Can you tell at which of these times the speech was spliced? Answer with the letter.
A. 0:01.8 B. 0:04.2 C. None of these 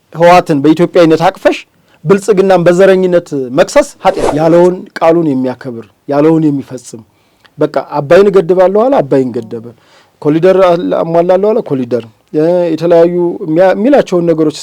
B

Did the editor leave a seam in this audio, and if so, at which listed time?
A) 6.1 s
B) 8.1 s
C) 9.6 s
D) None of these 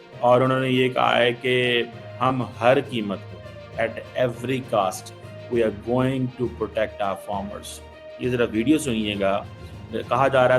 D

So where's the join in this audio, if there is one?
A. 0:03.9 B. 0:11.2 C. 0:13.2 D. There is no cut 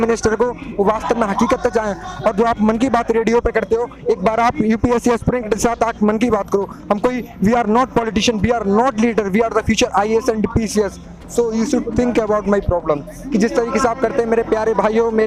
C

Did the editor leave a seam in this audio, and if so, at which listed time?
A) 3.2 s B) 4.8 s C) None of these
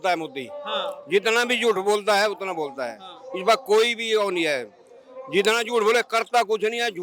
C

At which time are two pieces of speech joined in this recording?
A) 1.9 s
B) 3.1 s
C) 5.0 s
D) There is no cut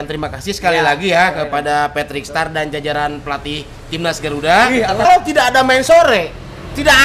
C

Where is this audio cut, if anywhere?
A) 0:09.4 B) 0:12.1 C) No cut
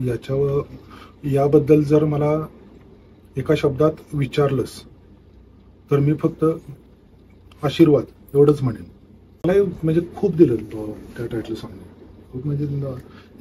A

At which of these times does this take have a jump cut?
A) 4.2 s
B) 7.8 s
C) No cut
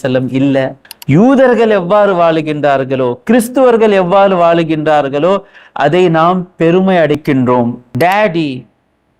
B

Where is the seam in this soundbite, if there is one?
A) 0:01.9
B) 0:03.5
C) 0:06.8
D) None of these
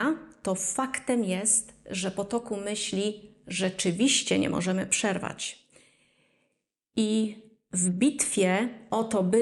D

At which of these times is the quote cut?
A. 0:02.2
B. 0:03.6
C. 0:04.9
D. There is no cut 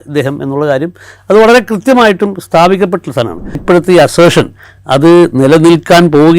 B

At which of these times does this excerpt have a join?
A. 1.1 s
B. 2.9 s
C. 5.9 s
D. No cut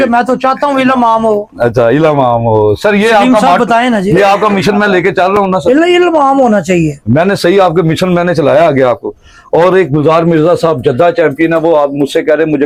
D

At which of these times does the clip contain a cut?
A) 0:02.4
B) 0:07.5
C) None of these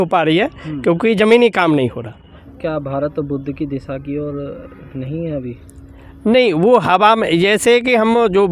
A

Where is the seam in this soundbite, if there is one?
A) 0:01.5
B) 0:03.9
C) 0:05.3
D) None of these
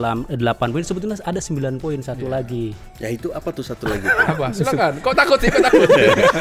D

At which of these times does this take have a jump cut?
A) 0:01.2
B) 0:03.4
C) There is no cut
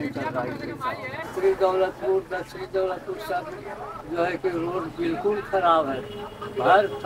A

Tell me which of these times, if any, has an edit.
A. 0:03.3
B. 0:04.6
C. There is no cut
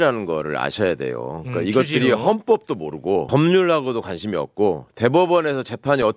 A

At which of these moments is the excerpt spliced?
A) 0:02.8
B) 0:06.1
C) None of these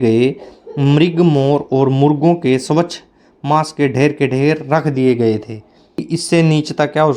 B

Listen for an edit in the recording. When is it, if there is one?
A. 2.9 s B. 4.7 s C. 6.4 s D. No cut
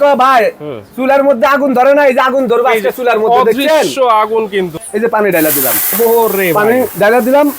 B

